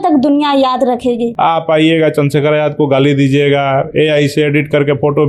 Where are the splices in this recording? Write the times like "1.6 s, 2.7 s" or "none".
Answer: 1.3 s